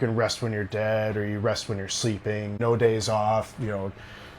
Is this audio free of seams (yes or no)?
no